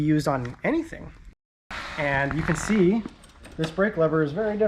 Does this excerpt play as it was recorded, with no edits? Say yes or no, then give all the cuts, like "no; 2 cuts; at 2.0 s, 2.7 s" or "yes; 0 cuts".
no; 1 cut; at 1.3 s